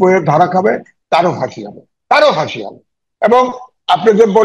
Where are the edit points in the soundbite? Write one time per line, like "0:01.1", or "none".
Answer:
none